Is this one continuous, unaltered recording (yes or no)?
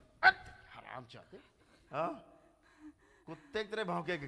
no